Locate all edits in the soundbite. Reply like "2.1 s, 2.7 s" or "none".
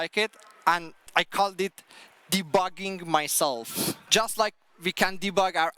1.0 s, 4.0 s